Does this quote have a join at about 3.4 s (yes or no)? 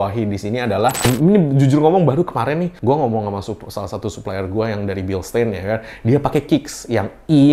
no